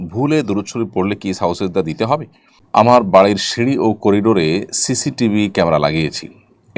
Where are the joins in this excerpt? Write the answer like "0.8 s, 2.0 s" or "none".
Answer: 2.5 s